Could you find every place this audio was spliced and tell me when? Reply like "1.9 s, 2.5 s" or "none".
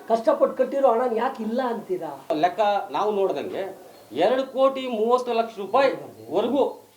2.3 s

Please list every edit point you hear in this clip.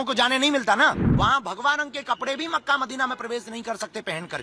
1.1 s

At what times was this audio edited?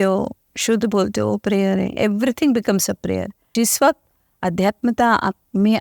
3.4 s

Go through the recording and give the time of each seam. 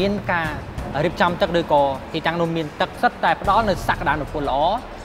2.9 s

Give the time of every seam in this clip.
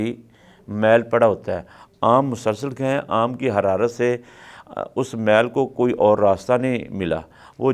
none

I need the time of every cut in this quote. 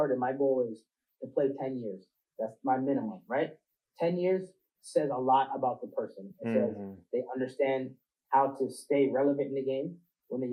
none

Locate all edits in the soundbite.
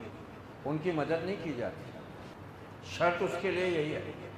2.3 s

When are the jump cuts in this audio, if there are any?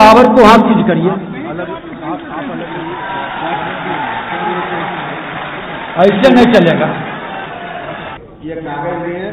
8.2 s

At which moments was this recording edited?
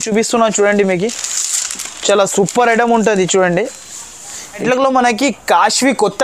4.6 s

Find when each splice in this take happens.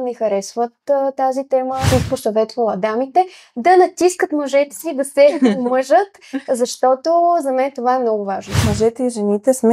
1.9 s, 8.6 s

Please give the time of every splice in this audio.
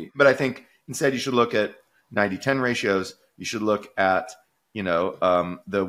none

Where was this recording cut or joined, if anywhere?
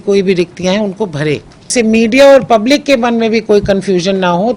1.7 s

